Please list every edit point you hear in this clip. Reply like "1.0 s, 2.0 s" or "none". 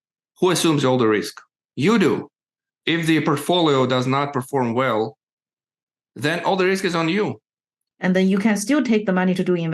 2.8 s, 7.9 s